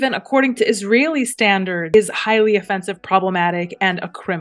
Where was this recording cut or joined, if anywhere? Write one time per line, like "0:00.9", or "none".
0:01.9

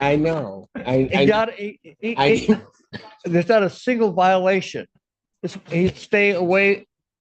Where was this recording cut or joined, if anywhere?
none

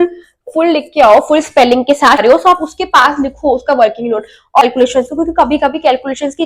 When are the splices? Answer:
0:02.2
0:04.6

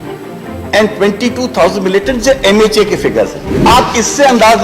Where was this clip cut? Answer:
0:03.4

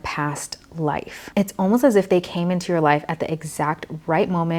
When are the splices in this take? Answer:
none

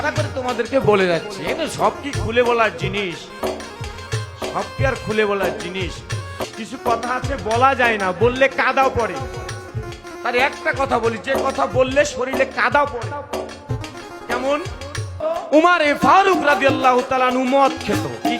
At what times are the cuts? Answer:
0:06.5
0:09.7
0:15.2

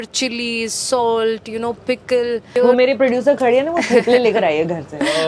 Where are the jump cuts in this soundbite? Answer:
0:02.6

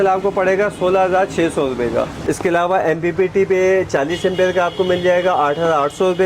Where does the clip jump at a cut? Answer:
0:02.2

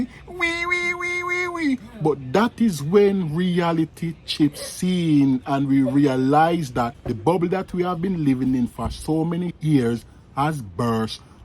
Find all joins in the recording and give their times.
0:07.0

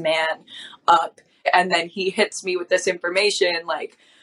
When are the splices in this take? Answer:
0:01.5

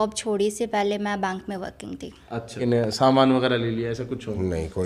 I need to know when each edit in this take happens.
0:02.6

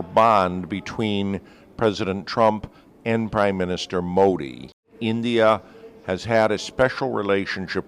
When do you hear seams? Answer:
0:04.9

